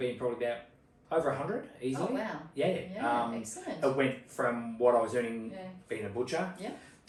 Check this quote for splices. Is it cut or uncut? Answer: uncut